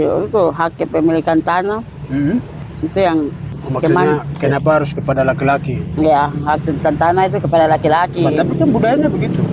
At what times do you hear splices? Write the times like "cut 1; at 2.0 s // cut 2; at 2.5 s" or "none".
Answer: cut 1; at 2.6 s // cut 2; at 3.5 s